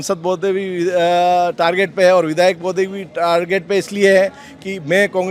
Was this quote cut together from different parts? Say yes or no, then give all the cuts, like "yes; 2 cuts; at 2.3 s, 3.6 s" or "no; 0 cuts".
no; 0 cuts